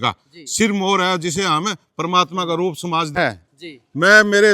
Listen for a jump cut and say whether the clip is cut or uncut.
cut